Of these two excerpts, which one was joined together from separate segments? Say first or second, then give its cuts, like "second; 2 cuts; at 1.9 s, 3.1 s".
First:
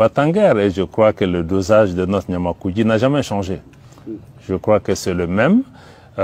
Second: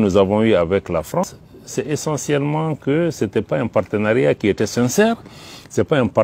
second; 1 cut; at 1.2 s